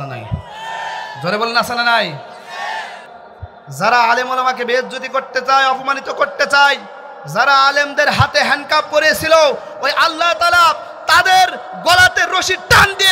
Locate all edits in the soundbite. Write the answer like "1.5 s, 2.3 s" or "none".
3.0 s

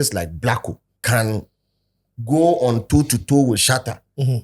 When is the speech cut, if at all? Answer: 0.9 s, 3.6 s

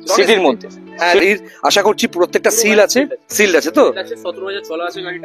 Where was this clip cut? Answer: 1.2 s

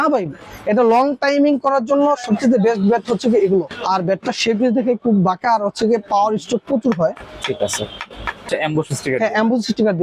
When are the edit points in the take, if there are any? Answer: 3.7 s, 8.5 s

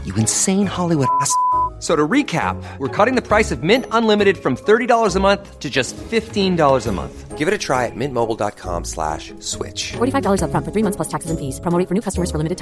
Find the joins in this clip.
none

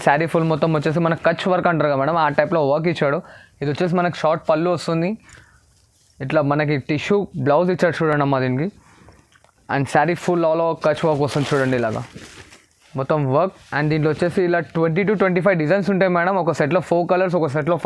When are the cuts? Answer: none

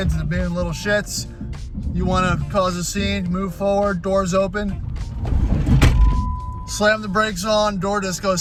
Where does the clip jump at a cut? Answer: none

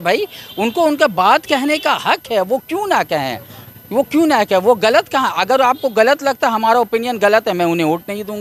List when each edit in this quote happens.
none

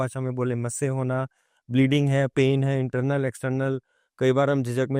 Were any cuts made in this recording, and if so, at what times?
none

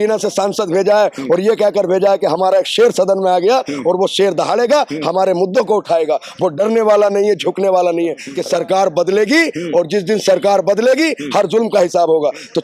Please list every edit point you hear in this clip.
8.3 s

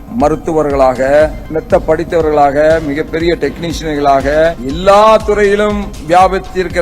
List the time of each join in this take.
1.4 s, 4.7 s

